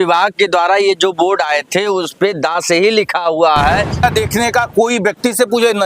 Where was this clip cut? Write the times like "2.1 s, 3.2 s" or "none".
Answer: 4.0 s